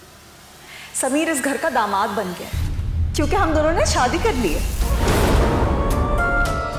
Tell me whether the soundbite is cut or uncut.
uncut